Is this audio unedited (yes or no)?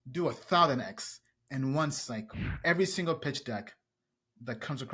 no